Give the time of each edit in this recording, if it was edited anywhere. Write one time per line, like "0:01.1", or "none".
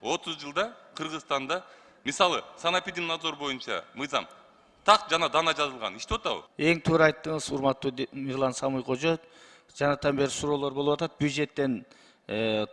0:06.5